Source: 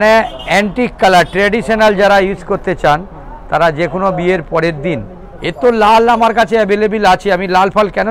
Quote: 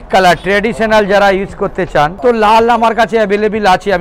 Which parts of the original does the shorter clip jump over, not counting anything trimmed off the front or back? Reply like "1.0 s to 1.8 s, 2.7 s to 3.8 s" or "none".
3.0 s to 5.5 s